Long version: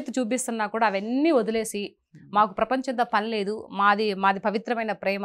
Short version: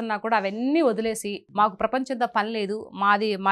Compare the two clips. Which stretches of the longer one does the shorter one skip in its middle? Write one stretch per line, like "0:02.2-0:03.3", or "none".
0:01.9-0:02.1